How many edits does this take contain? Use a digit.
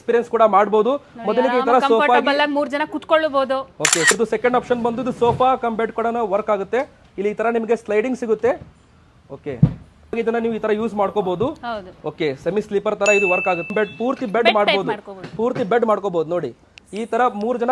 3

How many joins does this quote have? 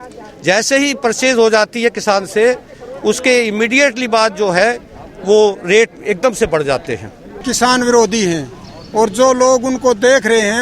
1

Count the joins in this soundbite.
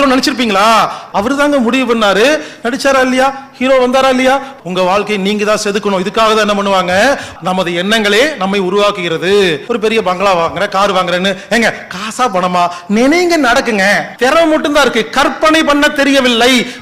5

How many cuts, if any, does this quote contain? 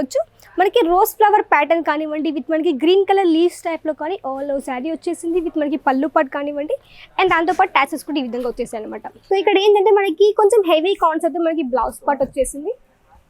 1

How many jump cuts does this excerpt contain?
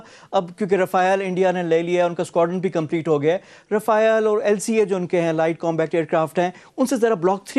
0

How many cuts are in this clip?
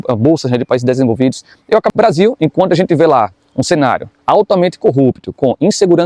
1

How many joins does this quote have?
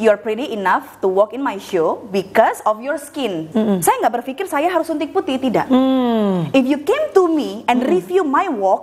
1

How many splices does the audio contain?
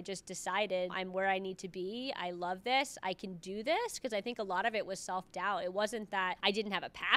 2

